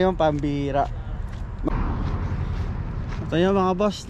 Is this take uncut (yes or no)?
no